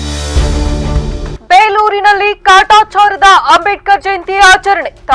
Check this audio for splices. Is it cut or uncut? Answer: cut